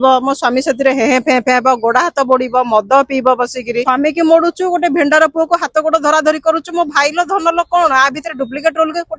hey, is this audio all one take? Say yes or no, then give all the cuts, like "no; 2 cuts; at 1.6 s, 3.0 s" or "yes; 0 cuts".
no; 1 cut; at 3.8 s